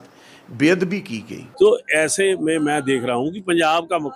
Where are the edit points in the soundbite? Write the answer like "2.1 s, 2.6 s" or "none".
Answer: 1.4 s